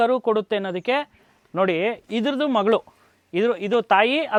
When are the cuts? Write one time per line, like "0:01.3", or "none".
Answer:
none